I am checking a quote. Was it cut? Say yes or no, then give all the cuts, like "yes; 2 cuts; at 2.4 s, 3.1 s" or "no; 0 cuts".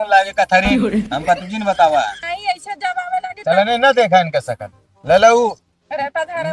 yes; 1 cut; at 2.2 s